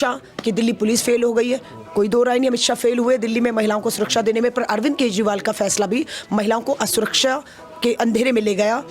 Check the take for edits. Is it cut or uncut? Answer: uncut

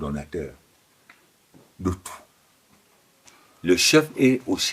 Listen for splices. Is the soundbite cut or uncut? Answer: cut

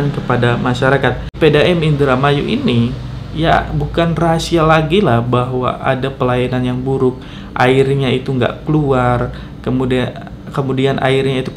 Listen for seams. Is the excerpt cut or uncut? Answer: cut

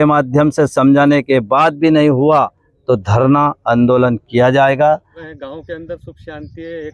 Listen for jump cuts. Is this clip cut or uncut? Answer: cut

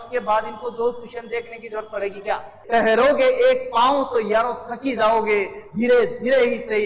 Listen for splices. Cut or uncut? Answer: cut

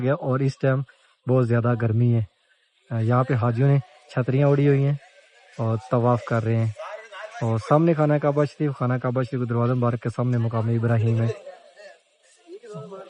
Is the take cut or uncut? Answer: uncut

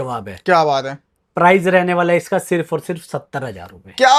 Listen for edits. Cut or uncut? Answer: uncut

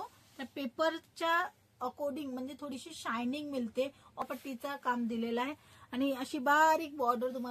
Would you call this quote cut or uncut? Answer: cut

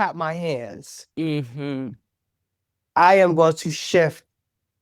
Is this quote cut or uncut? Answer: uncut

